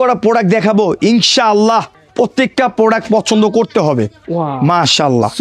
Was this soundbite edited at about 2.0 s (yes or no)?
yes